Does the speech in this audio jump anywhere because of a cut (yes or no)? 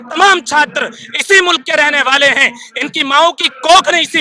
no